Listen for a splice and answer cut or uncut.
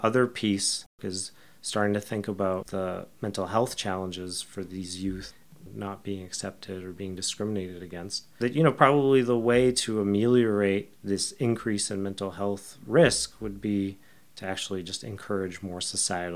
cut